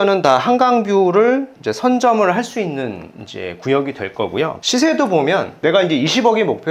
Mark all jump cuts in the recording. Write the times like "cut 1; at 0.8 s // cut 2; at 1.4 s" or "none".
none